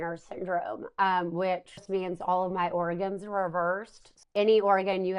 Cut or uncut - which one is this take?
cut